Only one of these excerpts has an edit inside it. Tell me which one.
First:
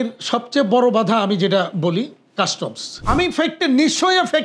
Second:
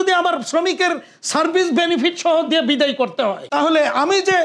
first; 1 cut; at 3.0 s

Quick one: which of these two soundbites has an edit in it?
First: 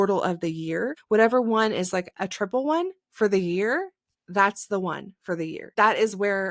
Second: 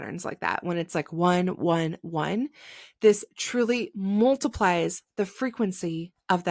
first; 2 cuts; at 1.0 s, 5.7 s

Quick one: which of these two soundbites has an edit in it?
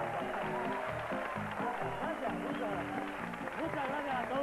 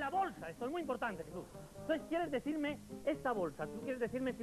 first; 1 cut; at 3.2 s

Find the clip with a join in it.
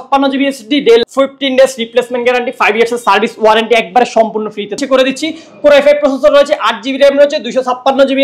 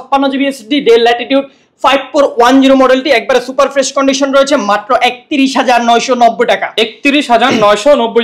first; 2 cuts; at 1.0 s, 4.8 s

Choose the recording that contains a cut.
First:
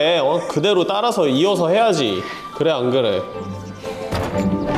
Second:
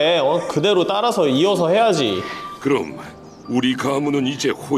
second; 1 cut; at 2.4 s

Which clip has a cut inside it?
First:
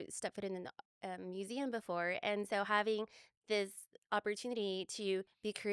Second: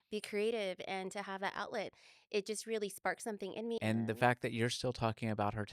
second; 1 cut; at 3.8 s

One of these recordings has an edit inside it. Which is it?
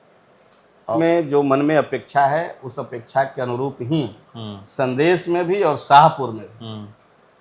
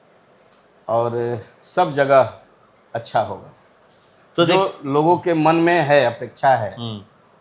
first; 1 cut; at 0.9 s

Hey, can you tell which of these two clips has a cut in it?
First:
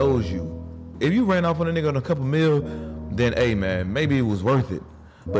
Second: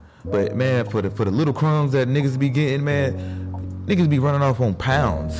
first; 1 cut; at 0.9 s

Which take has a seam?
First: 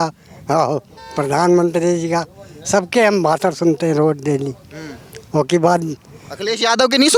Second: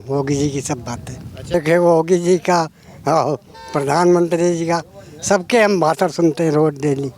second; 1 cut; at 1.5 s

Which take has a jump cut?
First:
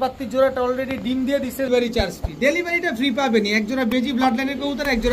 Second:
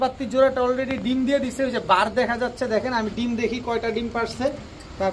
first; 1 cut; at 1.7 s

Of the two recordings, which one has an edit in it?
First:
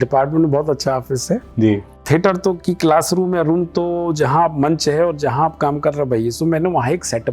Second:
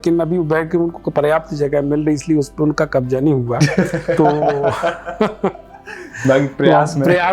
first; 1 cut; at 2.0 s

